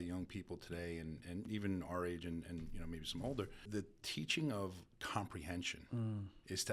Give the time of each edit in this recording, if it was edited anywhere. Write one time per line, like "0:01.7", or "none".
0:01.5
0:03.7